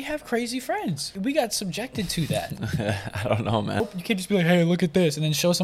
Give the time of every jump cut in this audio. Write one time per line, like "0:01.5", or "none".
0:01.1
0:03.8